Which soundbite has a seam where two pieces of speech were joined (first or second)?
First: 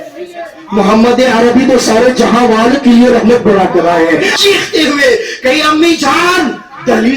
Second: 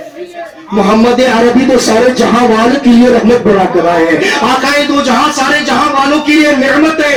first